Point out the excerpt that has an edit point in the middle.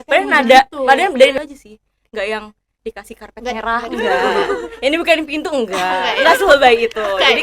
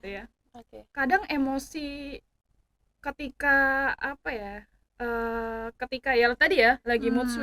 first; 1 cut; at 1.3 s

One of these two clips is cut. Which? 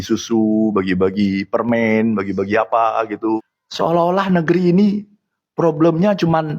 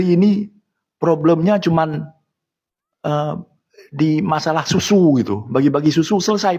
first; 1 cut; at 3.6 s

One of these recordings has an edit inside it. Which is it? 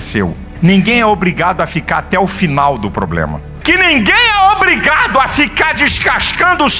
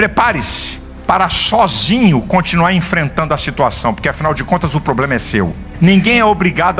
first; 1 cut; at 3.5 s

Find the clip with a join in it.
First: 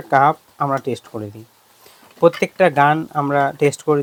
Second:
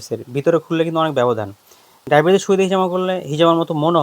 second; 1 cut; at 1.9 s

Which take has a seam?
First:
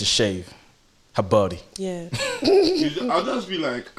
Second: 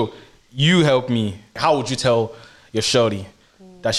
second; 1 cut; at 1.6 s

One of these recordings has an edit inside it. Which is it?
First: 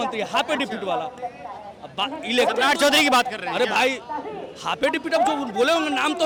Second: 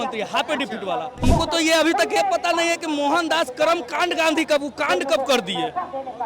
second; 1 cut; at 1.2 s

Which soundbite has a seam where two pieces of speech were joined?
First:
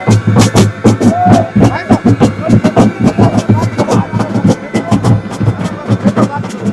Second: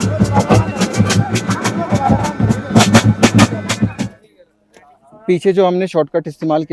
second; 1 cut; at 4.1 s

